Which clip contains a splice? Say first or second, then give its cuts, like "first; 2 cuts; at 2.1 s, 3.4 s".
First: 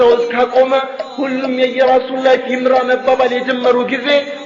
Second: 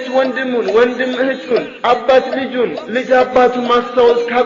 second; 1 cut; at 1.7 s